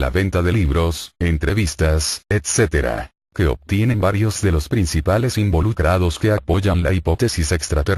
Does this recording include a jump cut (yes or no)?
yes